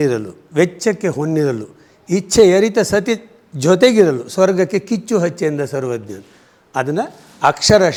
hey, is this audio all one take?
yes; 0 cuts

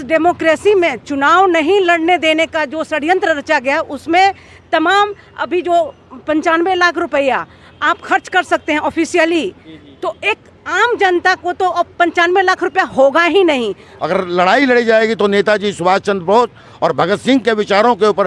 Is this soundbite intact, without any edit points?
no; 1 cut; at 13.8 s

